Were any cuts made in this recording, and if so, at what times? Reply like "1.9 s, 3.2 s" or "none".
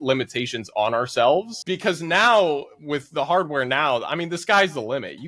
1.6 s